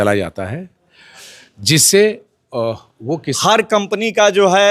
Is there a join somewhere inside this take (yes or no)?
yes